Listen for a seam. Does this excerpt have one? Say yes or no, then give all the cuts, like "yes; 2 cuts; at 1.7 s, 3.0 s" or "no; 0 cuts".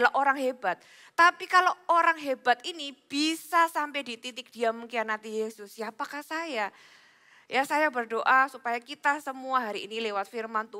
no; 0 cuts